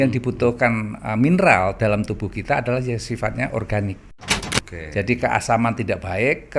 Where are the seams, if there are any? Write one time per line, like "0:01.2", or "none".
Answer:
0:04.4